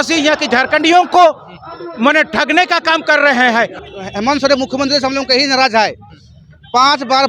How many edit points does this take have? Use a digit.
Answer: 1